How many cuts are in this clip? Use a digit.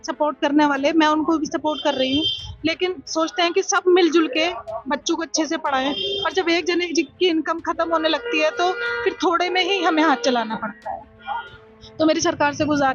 0